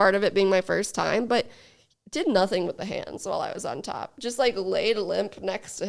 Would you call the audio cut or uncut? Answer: uncut